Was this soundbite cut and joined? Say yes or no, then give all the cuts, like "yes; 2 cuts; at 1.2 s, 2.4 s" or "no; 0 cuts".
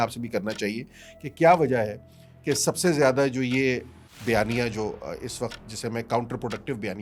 no; 0 cuts